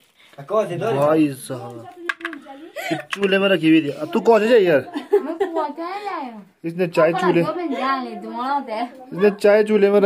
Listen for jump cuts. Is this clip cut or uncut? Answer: uncut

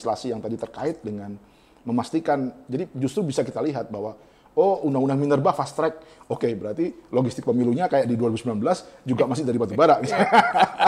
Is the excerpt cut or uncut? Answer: uncut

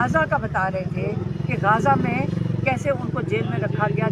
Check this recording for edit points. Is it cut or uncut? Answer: uncut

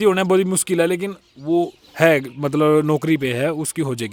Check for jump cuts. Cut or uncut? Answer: uncut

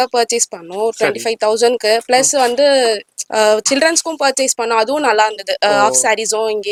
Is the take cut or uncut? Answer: uncut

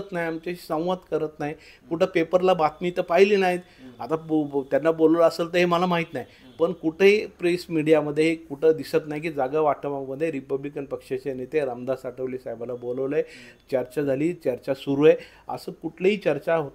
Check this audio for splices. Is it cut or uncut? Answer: uncut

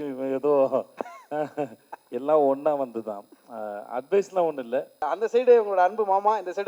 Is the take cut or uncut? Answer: cut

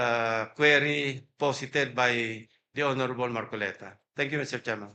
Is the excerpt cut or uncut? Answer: uncut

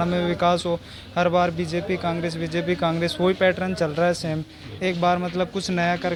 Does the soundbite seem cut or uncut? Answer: uncut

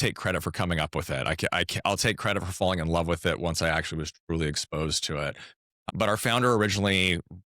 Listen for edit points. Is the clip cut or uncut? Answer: cut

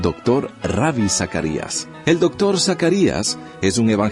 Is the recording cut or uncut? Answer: cut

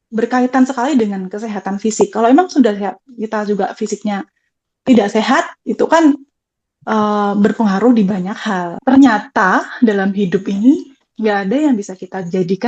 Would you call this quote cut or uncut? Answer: cut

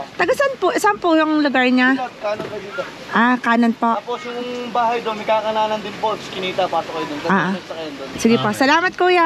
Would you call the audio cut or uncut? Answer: uncut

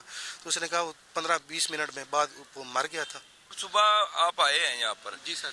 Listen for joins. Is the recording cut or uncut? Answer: cut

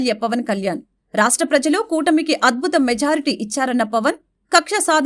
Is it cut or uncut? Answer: uncut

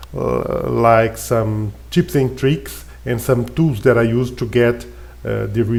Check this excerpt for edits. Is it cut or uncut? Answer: uncut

